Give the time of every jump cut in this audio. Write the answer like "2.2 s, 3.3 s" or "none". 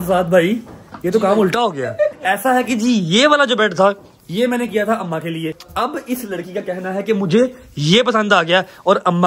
2.2 s, 5.6 s